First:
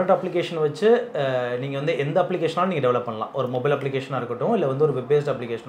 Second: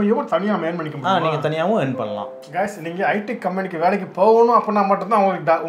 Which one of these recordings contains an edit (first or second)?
second